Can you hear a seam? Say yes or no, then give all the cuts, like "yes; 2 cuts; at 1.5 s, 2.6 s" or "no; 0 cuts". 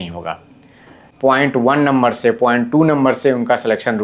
yes; 1 cut; at 1.0 s